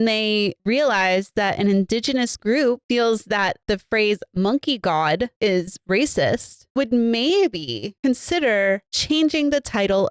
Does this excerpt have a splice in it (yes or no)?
no